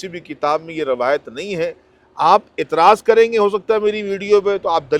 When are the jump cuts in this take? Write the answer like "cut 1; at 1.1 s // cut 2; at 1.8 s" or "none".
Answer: none

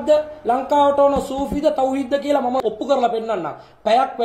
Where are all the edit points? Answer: cut 1; at 2.6 s

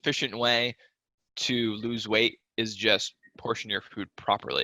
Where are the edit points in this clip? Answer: none

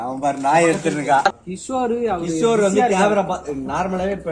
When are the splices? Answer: cut 1; at 1.3 s

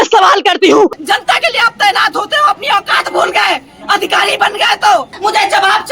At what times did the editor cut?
cut 1; at 1.0 s // cut 2; at 5.1 s

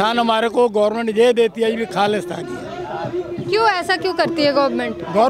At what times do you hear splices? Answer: none

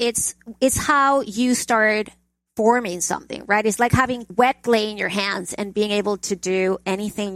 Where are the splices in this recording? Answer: cut 1; at 4.3 s

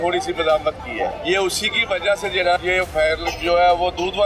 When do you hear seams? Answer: cut 1; at 1.2 s // cut 2; at 2.6 s

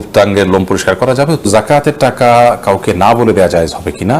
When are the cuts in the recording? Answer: cut 1; at 1.1 s

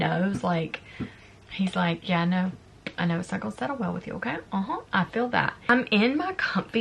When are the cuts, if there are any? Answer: cut 1; at 5.7 s

